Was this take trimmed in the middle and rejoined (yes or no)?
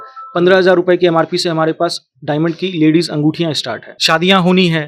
yes